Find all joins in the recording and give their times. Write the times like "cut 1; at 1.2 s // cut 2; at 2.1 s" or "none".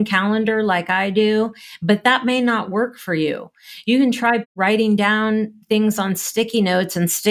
none